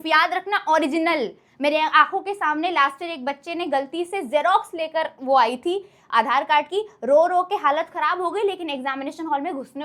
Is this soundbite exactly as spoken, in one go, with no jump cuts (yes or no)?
yes